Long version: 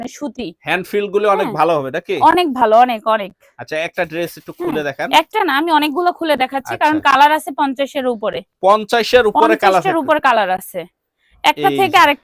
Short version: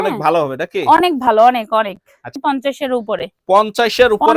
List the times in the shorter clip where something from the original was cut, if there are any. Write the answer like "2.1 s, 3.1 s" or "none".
2.3 s